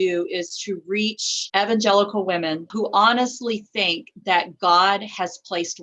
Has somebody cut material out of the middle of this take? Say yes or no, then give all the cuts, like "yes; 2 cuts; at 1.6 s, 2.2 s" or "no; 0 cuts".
yes; 2 cuts; at 1.3 s, 2.7 s